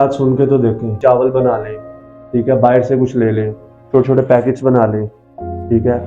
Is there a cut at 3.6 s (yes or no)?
no